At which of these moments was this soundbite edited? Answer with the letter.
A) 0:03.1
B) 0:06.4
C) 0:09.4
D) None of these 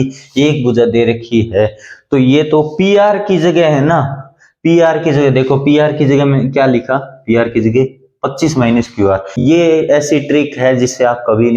C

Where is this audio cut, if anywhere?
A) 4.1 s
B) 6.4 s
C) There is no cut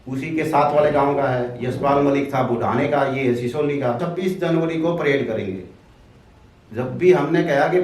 A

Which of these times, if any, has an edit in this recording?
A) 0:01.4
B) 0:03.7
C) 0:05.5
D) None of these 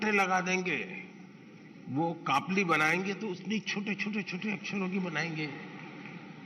D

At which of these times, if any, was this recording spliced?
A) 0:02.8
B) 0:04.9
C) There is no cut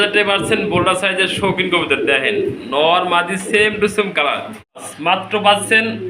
B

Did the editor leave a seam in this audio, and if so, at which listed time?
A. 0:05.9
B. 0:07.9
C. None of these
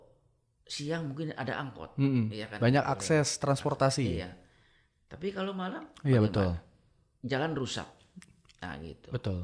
C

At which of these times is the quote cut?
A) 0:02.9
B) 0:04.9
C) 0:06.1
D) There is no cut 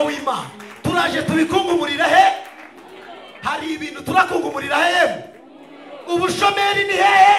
D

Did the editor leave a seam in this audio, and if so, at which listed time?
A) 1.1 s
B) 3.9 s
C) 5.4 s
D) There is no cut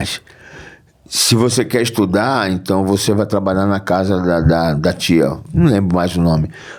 D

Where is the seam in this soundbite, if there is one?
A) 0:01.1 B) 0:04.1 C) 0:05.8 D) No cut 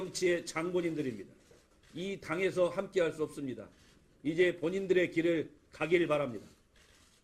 A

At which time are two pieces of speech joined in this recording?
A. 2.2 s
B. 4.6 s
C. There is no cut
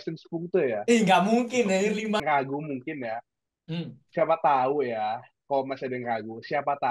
A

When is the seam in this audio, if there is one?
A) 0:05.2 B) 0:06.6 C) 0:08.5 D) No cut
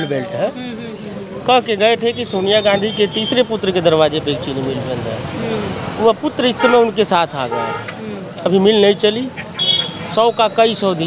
D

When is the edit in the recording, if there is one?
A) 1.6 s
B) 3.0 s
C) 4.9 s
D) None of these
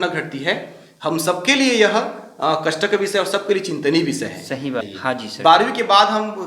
C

